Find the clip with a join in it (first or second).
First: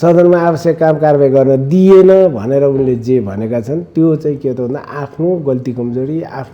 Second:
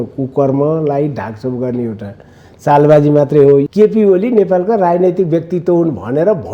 second